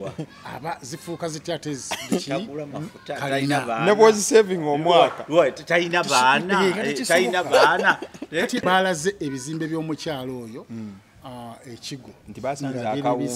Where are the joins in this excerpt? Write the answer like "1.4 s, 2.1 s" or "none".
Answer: 8.6 s

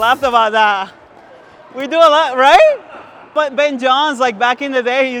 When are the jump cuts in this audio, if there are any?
none

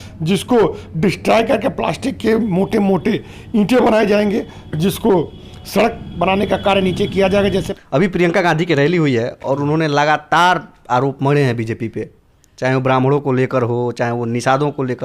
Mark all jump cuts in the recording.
7.7 s

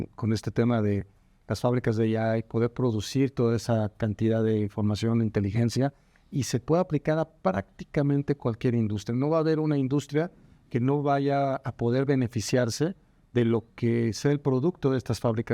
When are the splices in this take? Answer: none

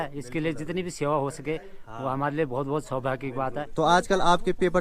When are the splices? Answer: 3.6 s

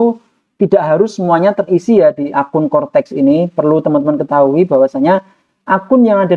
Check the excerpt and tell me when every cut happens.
none

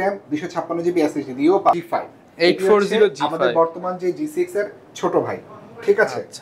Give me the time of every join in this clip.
1.8 s

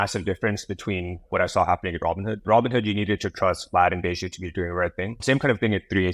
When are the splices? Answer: 1.2 s, 2.3 s, 5.2 s

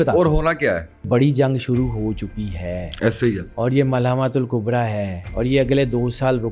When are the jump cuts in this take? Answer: 1.1 s

